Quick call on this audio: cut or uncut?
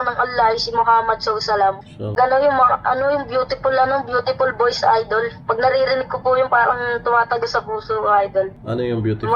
cut